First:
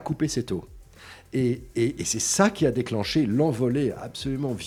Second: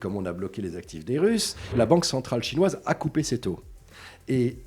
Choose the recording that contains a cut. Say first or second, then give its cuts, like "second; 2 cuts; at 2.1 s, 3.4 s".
second; 1 cut; at 1.8 s